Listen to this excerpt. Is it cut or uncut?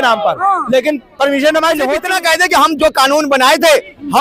cut